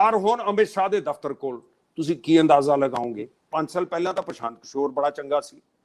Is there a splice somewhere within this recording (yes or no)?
yes